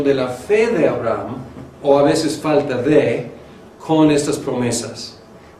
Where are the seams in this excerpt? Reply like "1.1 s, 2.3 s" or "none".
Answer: 4.4 s